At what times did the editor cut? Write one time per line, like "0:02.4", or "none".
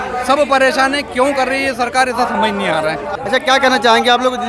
none